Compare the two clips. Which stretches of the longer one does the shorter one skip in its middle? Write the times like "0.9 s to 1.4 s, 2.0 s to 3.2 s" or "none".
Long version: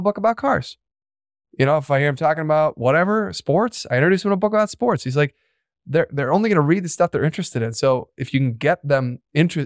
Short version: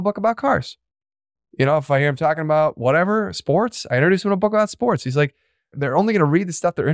5.8 s to 6.1 s